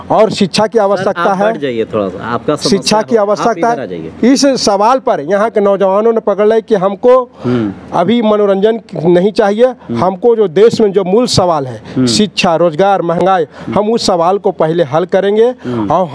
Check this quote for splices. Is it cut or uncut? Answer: uncut